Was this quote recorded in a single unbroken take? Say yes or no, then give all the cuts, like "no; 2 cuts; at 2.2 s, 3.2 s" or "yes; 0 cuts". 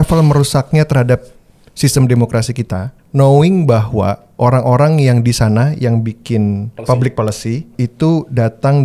no; 3 cuts; at 2.9 s, 6.7 s, 7.7 s